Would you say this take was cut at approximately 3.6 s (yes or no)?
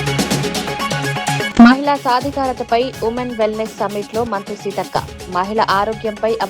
no